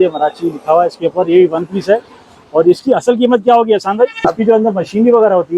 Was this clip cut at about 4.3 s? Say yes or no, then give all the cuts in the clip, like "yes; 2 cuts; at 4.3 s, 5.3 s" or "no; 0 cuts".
yes; 1 cut; at 4.3 s